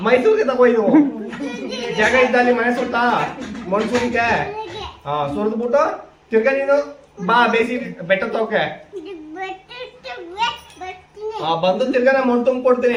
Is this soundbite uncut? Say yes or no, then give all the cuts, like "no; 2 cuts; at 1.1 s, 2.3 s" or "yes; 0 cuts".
yes; 0 cuts